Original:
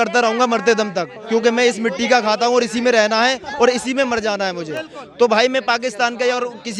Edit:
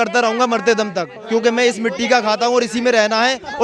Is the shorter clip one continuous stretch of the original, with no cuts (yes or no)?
yes